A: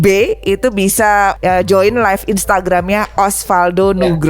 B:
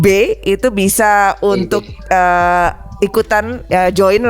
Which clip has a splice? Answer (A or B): A